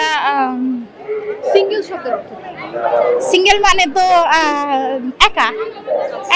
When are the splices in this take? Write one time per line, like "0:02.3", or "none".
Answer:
none